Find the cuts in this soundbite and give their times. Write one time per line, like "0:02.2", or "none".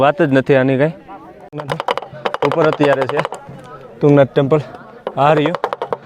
0:01.5